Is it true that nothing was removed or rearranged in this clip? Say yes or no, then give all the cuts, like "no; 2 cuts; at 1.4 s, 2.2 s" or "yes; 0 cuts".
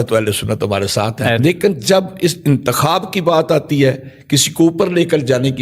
no; 1 cut; at 1.4 s